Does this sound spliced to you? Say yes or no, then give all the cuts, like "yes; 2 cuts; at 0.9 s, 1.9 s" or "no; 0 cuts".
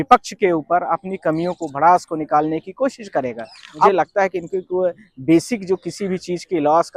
yes; 1 cut; at 3.9 s